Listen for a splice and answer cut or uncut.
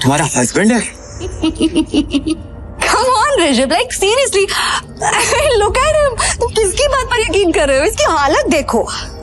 cut